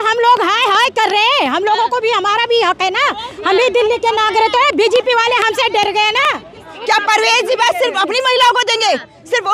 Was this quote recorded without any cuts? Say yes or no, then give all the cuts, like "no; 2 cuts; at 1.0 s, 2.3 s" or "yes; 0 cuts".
no; 1 cut; at 6.7 s